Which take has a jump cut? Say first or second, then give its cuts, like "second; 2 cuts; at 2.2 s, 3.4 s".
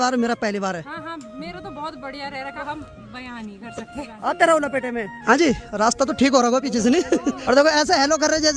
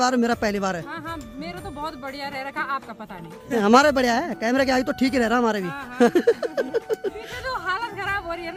first; 4 cuts; at 2.5 s, 3.9 s, 5.1 s, 7.4 s